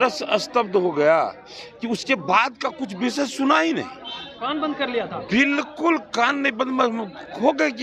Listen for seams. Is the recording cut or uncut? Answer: uncut